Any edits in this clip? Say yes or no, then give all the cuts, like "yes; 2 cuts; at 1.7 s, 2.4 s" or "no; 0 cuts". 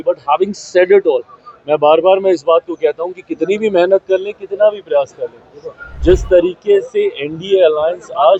no; 0 cuts